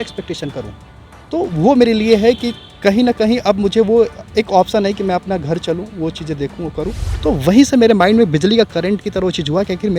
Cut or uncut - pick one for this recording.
cut